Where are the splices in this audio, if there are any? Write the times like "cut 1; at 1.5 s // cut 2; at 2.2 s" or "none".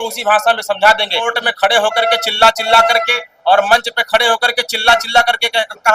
cut 1; at 1.4 s